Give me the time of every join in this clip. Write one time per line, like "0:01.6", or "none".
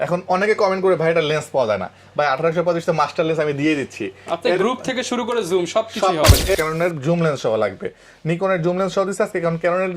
0:06.5